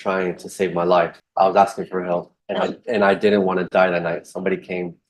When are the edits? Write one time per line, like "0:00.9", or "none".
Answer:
0:01.2
0:02.4

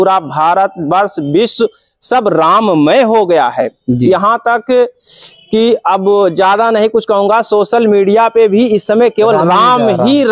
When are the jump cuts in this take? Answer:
none

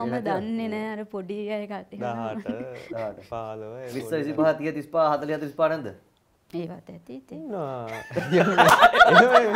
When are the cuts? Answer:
none

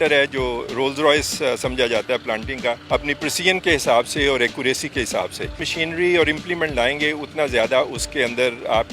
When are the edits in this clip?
0:02.8
0:05.7

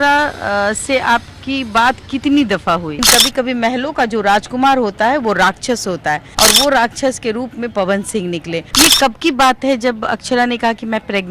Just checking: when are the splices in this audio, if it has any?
0:03.0
0:06.3
0:08.6

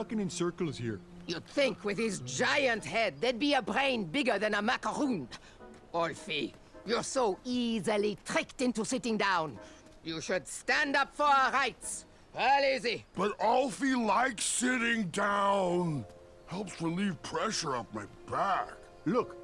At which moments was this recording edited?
0:01.1

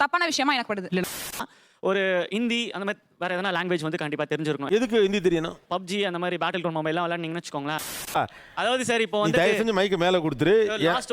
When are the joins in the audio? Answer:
0:01.6
0:07.8

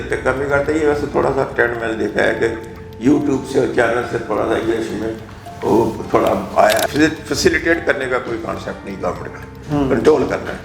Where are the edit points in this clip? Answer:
0:06.8

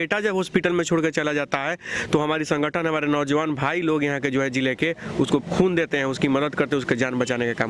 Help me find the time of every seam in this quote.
none

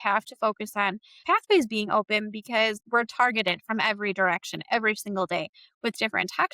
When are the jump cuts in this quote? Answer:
0:01.2
0:02.8

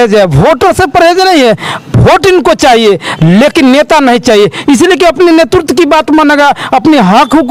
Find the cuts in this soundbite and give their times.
none

